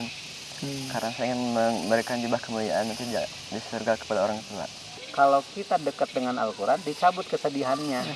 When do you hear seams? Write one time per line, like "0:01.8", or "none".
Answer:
0:04.9